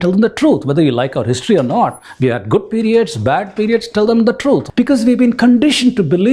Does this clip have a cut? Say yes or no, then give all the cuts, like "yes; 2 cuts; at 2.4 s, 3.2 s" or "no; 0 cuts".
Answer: yes; 1 cut; at 4.7 s